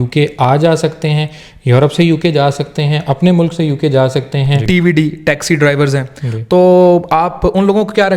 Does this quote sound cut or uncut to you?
cut